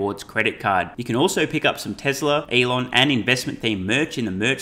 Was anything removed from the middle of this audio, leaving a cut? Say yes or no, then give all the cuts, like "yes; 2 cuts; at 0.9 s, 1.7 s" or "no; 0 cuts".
yes; 1 cut; at 2.5 s